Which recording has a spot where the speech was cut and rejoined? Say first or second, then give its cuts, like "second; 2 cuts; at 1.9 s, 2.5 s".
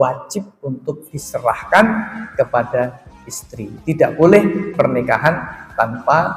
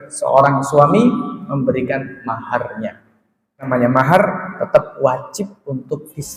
second; 1 cut; at 3.7 s